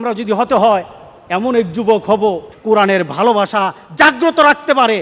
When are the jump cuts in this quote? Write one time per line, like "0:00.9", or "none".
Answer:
0:02.5